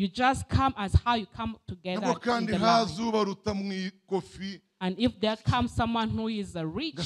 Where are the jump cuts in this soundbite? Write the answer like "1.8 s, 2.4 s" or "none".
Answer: none